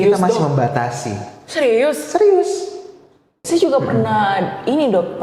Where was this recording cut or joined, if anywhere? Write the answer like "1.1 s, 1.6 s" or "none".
3.4 s